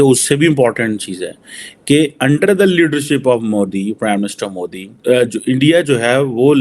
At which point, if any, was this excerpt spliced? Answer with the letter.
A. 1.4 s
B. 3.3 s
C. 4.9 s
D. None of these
C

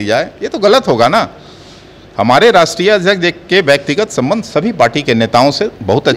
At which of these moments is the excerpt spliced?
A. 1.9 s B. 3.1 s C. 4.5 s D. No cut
D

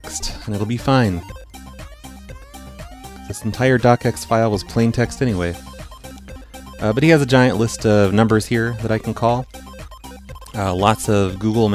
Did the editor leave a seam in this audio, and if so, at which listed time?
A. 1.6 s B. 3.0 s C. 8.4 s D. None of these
D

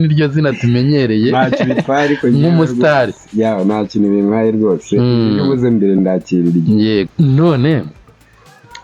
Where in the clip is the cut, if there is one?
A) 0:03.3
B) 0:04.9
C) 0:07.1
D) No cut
C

